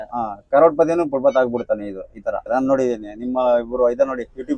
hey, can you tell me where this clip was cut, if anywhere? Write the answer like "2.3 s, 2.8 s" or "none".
2.5 s